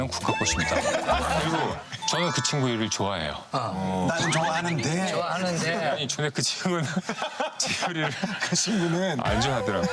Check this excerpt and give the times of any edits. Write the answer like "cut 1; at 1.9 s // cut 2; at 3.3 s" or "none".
cut 1; at 1.4 s